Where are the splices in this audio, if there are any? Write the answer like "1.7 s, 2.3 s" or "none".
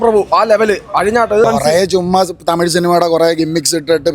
1.4 s